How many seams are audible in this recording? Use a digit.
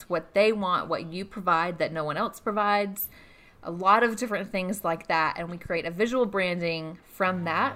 0